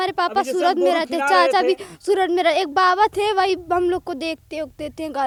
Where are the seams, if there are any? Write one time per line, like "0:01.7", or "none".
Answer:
none

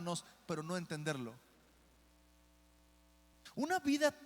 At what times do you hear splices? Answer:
0:03.3

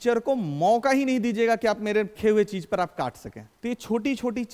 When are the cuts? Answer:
none

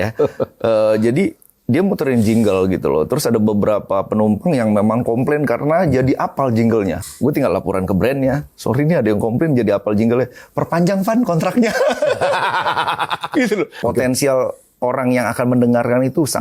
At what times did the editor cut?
0:07.1
0:13.8

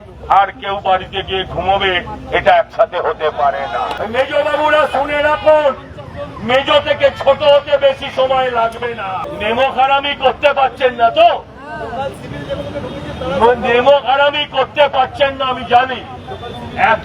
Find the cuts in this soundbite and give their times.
0:03.9
0:09.2

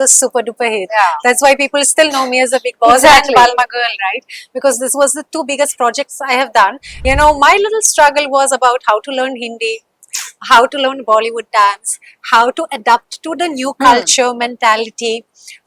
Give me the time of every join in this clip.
0:06.9

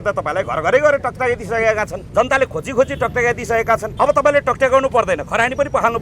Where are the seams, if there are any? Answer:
0:02.0
0:03.9

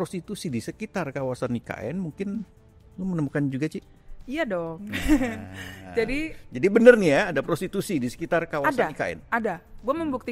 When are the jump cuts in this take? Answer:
none

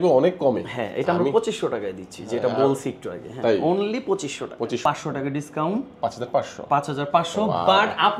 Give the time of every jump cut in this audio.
0:04.8

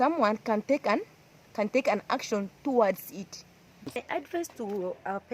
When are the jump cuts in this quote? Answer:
0:04.0

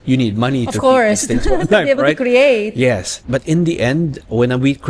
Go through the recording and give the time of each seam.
0:03.2

